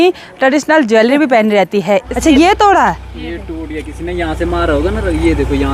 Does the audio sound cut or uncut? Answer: cut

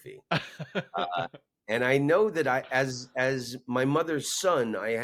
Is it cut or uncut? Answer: uncut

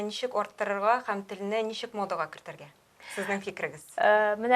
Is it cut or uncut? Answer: uncut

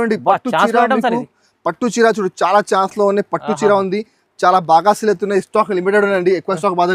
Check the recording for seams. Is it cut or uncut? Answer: uncut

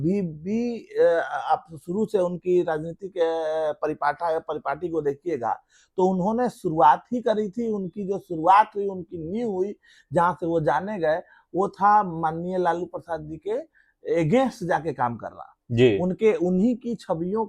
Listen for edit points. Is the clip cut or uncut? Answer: uncut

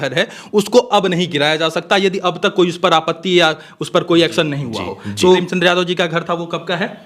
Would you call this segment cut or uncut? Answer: cut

